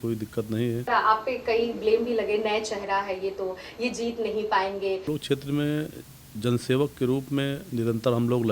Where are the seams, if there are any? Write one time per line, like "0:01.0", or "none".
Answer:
0:00.9
0:05.1